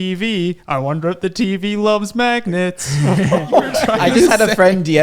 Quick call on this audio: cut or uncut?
cut